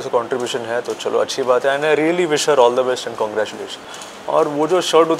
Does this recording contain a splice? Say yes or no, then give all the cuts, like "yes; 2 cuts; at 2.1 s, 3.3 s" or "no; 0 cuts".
yes; 1 cut; at 3.9 s